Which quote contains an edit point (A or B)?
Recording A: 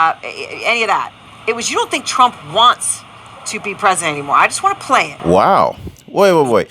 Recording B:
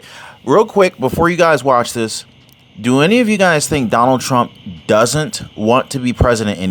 A